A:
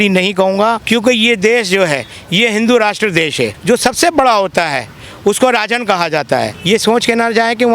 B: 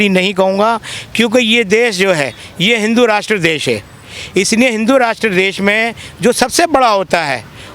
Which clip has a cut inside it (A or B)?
A